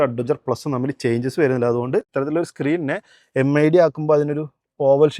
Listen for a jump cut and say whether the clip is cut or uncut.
cut